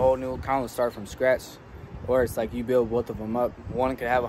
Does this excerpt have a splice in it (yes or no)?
no